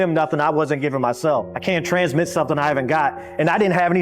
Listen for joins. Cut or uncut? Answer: cut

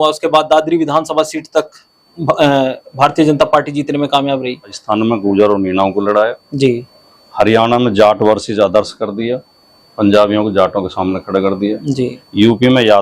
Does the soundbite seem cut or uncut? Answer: cut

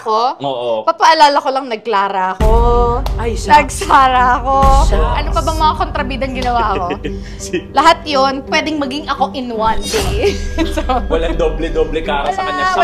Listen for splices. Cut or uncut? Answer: uncut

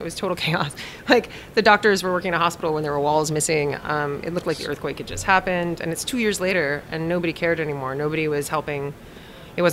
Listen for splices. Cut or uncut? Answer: uncut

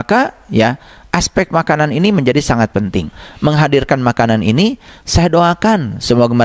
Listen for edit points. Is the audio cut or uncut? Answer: cut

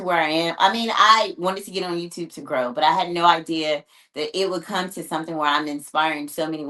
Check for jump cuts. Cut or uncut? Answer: uncut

